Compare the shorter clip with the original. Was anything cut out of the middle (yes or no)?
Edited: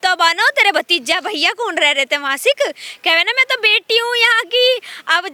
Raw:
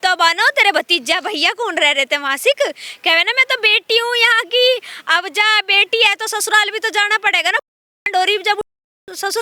no